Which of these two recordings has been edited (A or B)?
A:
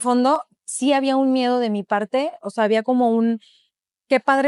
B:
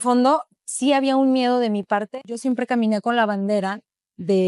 B